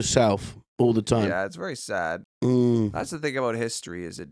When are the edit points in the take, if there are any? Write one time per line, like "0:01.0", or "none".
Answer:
0:01.3